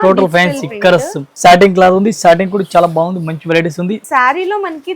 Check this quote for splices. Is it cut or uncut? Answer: cut